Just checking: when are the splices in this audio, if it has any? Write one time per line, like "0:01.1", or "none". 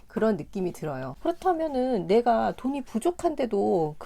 0:01.0